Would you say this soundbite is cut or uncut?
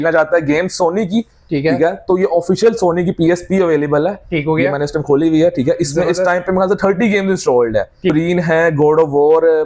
cut